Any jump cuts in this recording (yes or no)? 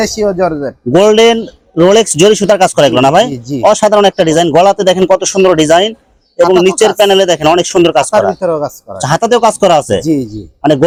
no